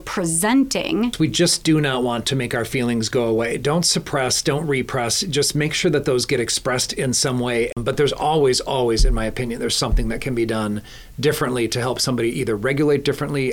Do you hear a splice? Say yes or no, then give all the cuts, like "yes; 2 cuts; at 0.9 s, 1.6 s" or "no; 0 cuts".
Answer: yes; 2 cuts; at 1.1 s, 7.7 s